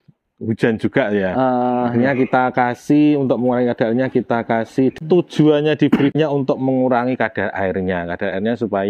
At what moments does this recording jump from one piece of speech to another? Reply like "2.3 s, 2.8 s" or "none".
5.0 s, 6.1 s